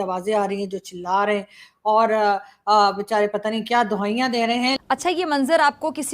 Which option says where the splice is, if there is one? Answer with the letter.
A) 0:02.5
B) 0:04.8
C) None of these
B